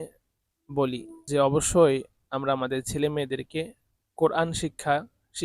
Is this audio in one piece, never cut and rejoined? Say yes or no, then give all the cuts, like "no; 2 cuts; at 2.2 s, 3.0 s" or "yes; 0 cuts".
no; 1 cut; at 1.1 s